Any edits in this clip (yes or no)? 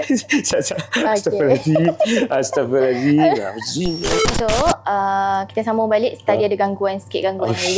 yes